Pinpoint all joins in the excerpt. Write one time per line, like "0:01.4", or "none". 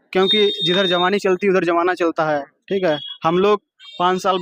none